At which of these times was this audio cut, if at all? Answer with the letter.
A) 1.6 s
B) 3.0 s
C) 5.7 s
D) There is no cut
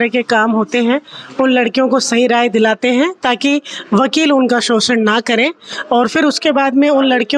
D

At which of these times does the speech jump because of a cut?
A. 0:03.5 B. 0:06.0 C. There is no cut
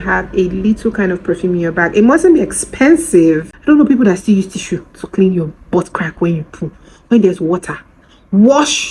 A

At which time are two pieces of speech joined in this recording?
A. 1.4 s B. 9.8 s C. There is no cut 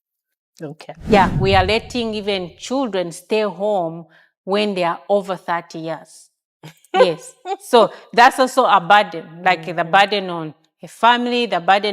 A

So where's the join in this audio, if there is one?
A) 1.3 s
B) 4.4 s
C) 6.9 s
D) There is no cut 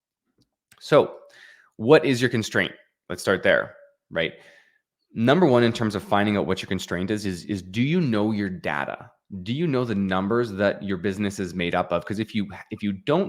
D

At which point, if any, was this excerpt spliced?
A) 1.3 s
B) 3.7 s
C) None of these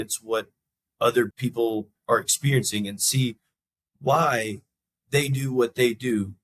A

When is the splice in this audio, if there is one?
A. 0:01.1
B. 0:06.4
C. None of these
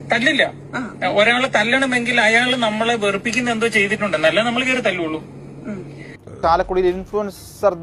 B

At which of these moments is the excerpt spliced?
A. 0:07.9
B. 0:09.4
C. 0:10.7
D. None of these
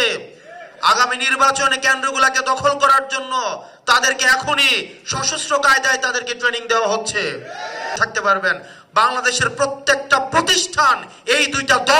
A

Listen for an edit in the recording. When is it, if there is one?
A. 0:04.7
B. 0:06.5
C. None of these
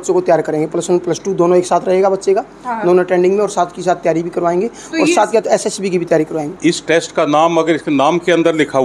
B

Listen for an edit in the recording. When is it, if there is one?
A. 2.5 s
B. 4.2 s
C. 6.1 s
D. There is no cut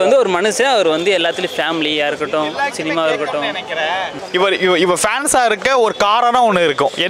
B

